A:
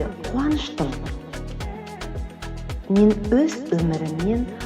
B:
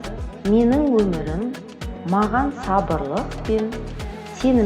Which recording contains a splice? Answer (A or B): A